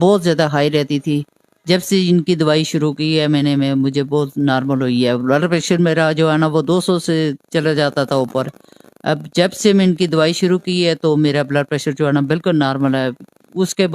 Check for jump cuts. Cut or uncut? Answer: uncut